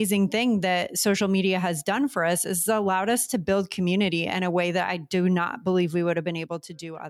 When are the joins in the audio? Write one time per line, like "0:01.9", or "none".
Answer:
none